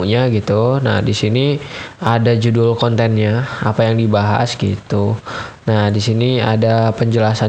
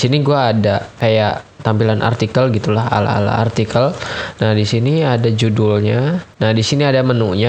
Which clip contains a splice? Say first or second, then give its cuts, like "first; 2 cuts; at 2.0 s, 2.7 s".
second; 2 cuts; at 0.9 s, 6.3 s